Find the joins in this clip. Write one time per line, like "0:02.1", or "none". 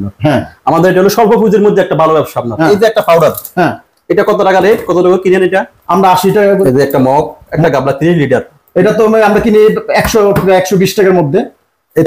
0:02.5
0:06.6
0:07.5